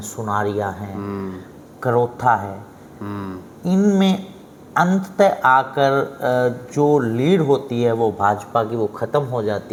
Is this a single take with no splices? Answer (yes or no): yes